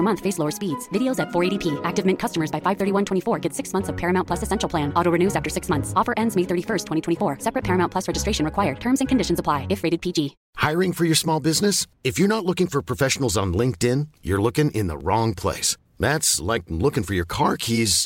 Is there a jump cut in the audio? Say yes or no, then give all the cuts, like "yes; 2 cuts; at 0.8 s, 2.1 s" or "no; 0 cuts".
yes; 1 cut; at 10.4 s